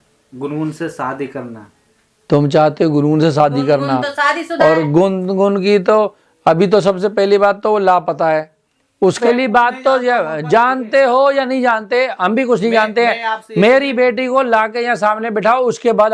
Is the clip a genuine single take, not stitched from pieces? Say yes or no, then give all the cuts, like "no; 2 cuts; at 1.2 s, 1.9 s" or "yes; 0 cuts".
no; 1 cut; at 9.2 s